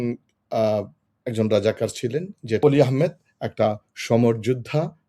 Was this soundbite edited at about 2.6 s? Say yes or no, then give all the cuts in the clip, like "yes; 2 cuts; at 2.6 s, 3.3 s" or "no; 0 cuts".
yes; 1 cut; at 2.6 s